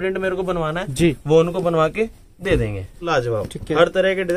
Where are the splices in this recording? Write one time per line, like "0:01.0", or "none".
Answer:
0:03.0